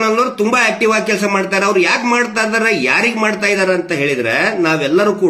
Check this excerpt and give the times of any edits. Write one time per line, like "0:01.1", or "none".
none